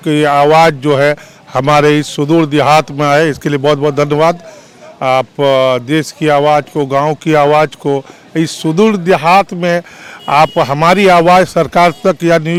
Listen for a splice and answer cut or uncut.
uncut